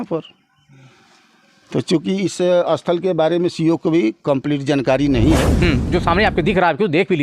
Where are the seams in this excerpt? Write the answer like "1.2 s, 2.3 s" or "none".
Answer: 5.5 s